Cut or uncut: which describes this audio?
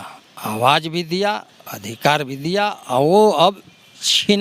uncut